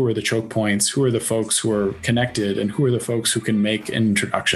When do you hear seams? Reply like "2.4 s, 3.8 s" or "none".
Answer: none